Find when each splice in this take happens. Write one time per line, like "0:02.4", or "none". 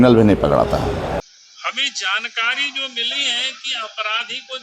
0:01.2